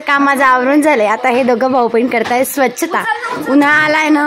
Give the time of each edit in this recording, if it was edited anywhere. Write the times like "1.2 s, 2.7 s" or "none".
none